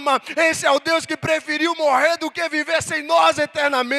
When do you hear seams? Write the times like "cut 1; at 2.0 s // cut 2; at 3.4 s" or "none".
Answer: none

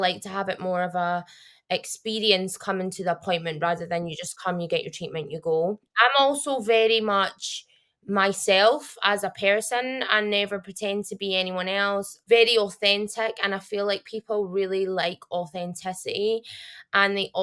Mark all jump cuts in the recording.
cut 1; at 5.9 s // cut 2; at 12.1 s

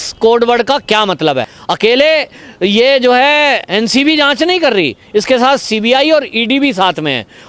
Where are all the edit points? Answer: cut 1; at 1.6 s

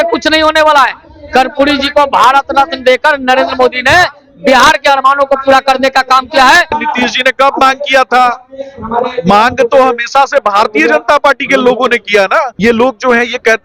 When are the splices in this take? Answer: cut 1; at 6.8 s // cut 2; at 12.5 s

